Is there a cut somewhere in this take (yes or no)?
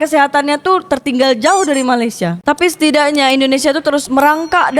no